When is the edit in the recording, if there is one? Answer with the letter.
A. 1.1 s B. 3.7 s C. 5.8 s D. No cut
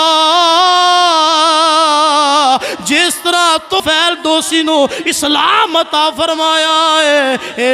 B